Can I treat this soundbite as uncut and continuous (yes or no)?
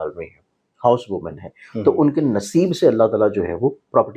yes